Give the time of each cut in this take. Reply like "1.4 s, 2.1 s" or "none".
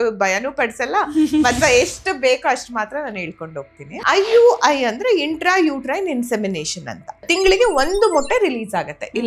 4.0 s, 7.3 s